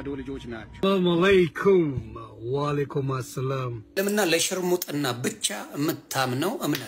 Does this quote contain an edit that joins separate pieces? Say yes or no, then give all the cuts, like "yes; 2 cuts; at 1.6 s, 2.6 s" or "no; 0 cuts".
yes; 2 cuts; at 0.8 s, 3.8 s